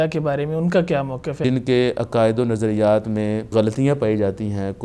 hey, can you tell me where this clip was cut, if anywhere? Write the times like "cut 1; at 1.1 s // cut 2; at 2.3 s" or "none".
cut 1; at 1.4 s // cut 2; at 3.5 s

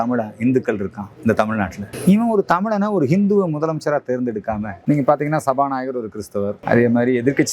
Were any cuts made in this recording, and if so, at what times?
cut 1; at 1.0 s // cut 2; at 1.9 s // cut 3; at 4.8 s

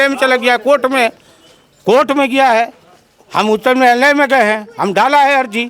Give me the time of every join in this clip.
none

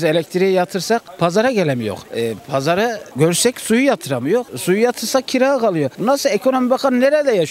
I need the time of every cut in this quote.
none

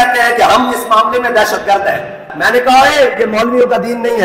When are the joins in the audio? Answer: cut 1; at 2.3 s

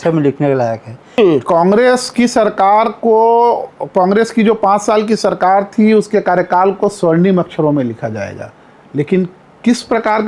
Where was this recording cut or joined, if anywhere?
cut 1; at 1.2 s

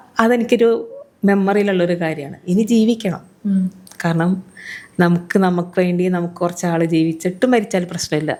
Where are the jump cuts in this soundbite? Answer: none

